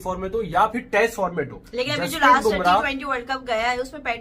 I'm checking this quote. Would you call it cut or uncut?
uncut